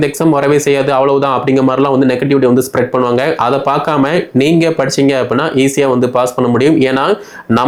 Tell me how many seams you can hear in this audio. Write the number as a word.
zero